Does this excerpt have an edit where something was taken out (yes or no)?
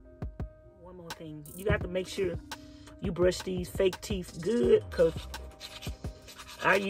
yes